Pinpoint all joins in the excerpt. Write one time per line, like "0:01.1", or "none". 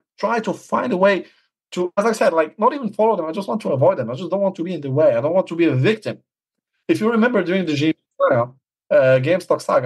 none